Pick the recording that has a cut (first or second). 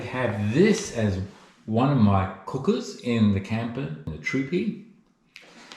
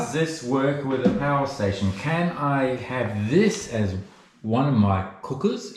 first